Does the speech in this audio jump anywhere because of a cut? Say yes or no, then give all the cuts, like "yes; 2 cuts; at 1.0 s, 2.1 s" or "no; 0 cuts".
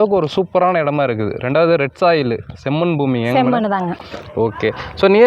no; 0 cuts